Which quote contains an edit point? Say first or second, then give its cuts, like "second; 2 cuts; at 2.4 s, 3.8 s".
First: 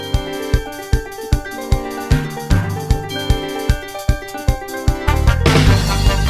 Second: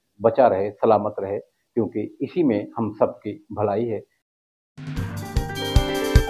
second; 1 cut; at 4.1 s